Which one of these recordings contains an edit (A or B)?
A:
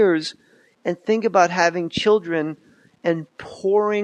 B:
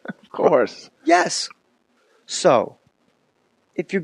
A